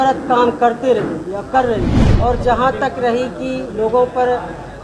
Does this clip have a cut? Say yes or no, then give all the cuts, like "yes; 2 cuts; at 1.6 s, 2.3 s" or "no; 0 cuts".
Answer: yes; 1 cut; at 2.0 s